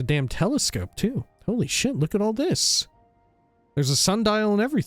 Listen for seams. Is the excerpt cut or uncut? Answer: cut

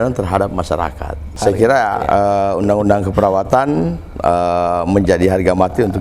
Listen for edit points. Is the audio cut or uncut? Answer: cut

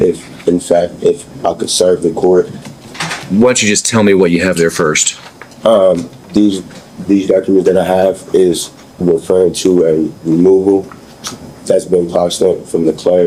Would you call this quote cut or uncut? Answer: uncut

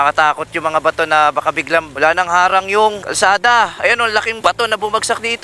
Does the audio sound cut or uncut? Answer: cut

